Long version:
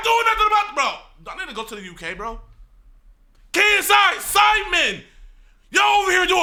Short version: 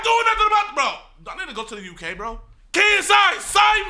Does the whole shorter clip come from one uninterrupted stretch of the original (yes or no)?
no